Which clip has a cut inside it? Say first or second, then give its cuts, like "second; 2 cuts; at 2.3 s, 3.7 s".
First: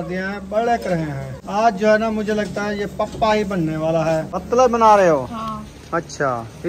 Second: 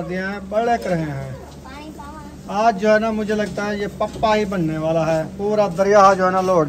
first; 2 cuts; at 1.3 s, 4.3 s